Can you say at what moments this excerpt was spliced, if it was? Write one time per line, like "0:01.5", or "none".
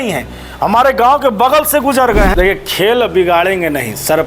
0:02.3